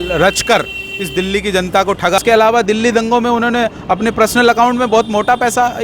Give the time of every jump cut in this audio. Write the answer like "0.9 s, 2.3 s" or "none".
2.2 s